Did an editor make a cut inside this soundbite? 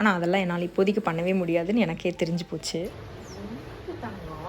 yes; 1 cut; at 2.8 s

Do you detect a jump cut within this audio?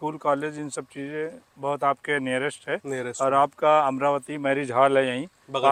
no; 0 cuts

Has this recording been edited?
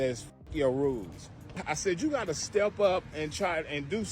yes; 1 cut; at 1.6 s

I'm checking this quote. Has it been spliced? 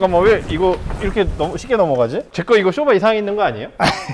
yes; 1 cut; at 2.3 s

